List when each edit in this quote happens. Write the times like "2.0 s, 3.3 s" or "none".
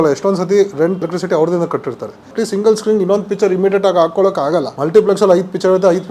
1.0 s, 2.2 s, 4.8 s